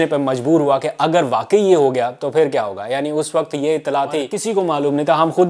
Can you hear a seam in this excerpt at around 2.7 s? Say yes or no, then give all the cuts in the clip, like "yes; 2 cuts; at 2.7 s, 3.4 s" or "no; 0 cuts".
no; 1 cut; at 4.4 s